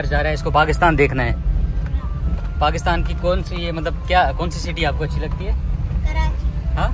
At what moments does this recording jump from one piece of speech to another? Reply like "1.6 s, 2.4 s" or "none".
none